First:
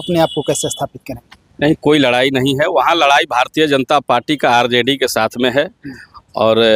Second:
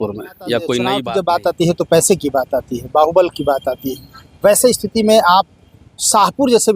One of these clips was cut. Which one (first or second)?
second